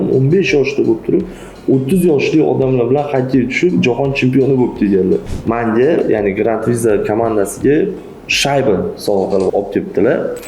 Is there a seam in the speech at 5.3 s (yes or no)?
yes